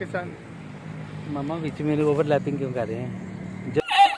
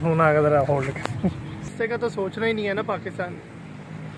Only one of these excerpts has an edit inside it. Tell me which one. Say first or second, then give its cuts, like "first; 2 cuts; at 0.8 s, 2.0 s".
second; 1 cut; at 1.5 s